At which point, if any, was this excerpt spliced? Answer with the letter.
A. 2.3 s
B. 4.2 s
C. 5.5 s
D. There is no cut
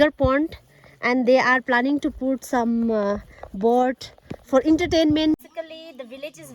C